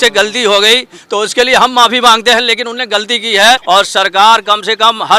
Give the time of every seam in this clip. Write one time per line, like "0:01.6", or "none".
0:03.6